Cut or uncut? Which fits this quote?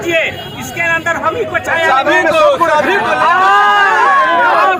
uncut